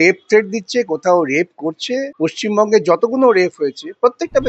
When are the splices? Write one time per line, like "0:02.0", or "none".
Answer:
0:02.1